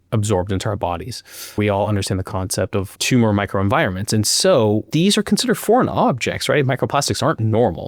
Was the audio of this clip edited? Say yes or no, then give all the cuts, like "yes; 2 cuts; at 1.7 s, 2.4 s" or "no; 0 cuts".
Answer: yes; 2 cuts; at 1.5 s, 4.9 s